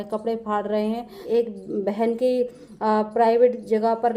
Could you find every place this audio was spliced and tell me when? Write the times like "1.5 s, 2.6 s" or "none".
1.2 s